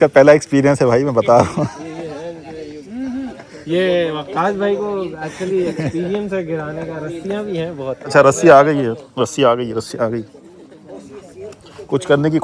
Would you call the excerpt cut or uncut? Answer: uncut